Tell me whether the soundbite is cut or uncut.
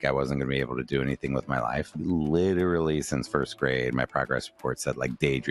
uncut